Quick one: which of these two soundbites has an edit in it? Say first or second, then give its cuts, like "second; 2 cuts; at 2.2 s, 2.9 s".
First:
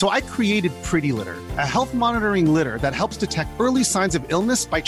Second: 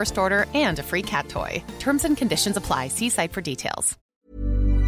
second; 1 cut; at 4.0 s